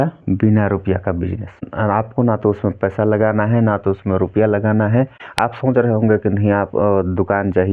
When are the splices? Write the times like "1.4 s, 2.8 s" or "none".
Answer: 1.7 s, 5.2 s